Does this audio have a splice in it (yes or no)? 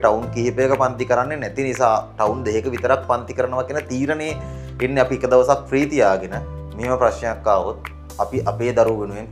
no